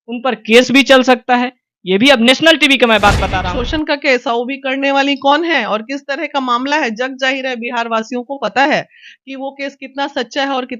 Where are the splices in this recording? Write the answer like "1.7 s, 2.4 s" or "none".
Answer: 3.3 s